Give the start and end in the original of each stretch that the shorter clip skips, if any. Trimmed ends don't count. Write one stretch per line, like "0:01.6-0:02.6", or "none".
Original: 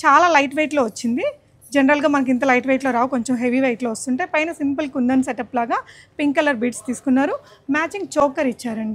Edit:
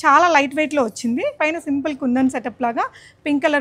0:01.4-0:04.3